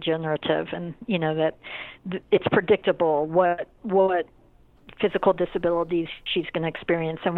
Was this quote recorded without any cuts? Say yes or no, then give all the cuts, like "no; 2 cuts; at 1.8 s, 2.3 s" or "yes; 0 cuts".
yes; 0 cuts